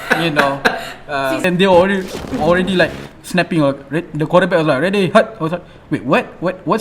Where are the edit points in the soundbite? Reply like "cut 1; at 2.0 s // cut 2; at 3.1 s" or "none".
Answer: cut 1; at 1.4 s